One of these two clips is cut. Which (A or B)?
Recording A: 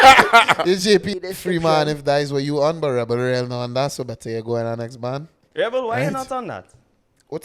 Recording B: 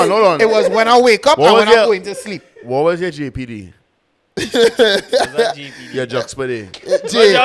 A